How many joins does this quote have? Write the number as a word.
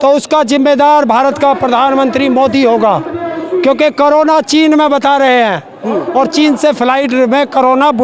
zero